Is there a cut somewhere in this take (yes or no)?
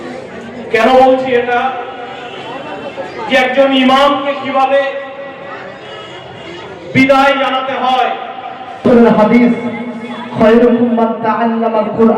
yes